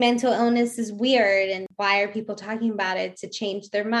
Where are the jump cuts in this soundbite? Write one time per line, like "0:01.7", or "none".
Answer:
0:01.7